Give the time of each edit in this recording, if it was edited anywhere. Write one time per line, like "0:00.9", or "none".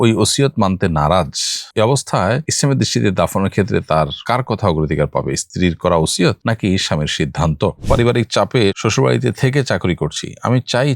0:07.8